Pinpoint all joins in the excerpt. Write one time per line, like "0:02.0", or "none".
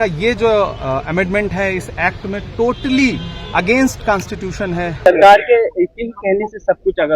0:05.1